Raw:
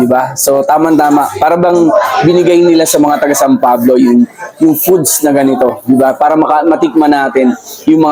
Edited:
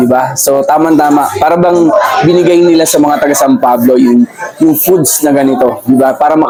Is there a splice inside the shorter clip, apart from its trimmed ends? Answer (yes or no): no